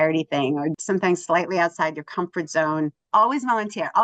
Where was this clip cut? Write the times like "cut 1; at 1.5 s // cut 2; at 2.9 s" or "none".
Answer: cut 1; at 0.8 s // cut 2; at 3.0 s